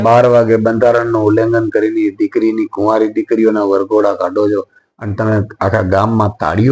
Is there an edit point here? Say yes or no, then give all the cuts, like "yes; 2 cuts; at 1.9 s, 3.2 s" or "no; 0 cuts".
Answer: no; 0 cuts